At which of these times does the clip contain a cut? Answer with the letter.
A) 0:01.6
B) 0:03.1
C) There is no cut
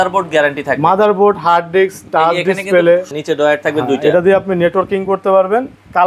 B